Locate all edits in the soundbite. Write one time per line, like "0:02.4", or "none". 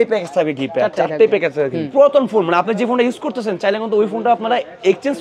0:01.9